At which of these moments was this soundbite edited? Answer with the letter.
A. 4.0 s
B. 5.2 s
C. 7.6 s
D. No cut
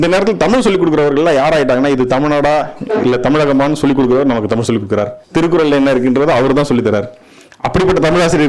B